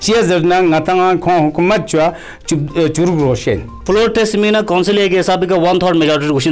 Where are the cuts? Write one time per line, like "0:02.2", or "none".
0:03.8